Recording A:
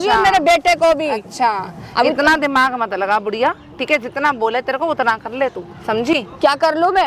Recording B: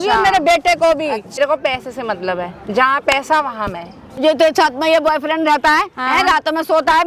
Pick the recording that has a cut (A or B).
B